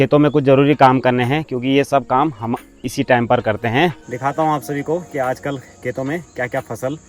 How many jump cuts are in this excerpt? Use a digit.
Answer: 1